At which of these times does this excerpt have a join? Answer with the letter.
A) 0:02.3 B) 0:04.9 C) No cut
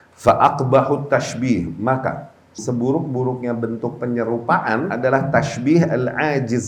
B